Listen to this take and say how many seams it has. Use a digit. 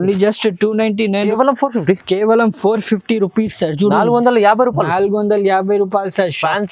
1